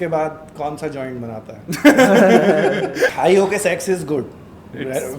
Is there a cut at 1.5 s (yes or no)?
no